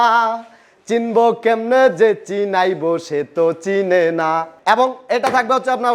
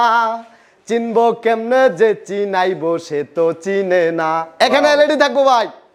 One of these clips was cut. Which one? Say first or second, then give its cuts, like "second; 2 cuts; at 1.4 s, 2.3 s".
first; 1 cut; at 4.5 s